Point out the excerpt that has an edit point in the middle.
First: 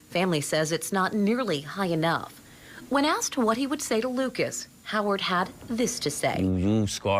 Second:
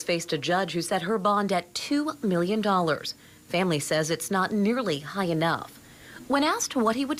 first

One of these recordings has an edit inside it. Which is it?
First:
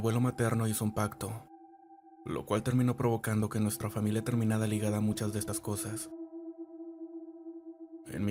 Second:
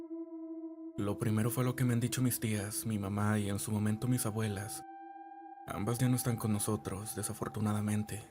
second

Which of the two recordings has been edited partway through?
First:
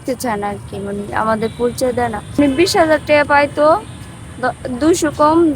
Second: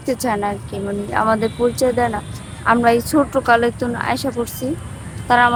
first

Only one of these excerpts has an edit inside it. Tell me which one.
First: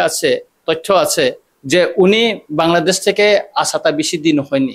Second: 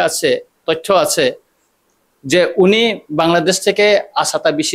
first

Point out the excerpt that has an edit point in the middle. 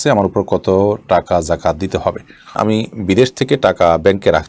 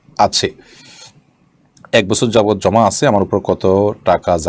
first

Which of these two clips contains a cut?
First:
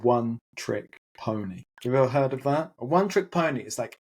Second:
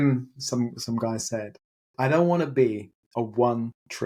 first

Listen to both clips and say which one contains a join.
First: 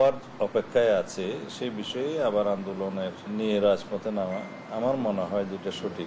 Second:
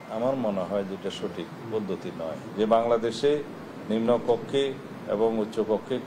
first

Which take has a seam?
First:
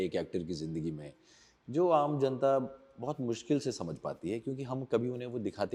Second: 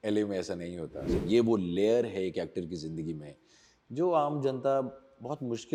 second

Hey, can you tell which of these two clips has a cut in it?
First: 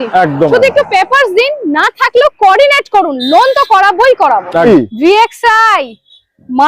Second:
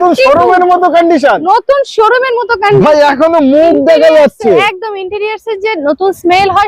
first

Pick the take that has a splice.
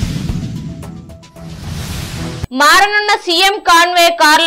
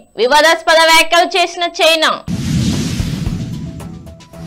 first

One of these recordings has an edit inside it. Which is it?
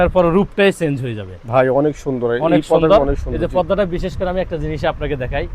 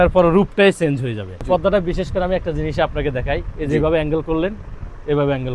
second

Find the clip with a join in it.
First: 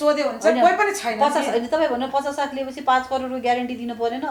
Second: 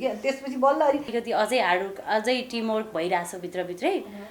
second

